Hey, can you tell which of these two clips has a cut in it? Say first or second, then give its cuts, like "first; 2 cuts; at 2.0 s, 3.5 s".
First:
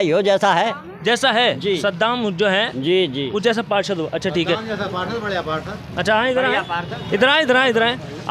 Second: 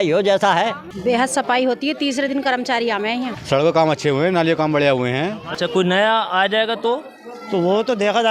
second; 3 cuts; at 0.9 s, 3.4 s, 5.4 s